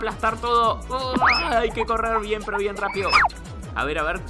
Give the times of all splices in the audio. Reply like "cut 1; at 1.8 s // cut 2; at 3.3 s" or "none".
cut 1; at 3.3 s